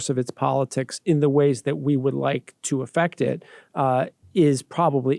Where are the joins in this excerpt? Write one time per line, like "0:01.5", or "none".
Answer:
none